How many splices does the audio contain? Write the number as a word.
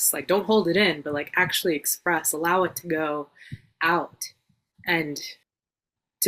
one